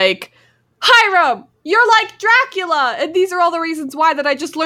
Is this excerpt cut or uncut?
uncut